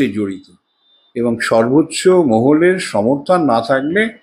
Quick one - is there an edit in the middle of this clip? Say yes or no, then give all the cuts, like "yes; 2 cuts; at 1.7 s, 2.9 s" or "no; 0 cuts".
no; 0 cuts